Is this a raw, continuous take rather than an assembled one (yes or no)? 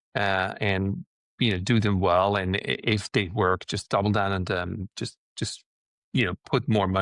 yes